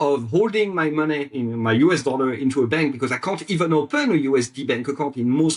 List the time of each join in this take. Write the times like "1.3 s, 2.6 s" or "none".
none